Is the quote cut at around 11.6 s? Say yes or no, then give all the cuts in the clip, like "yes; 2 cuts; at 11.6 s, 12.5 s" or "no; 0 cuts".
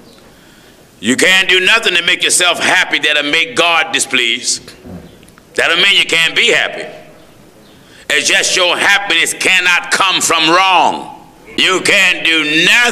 yes; 1 cut; at 11.6 s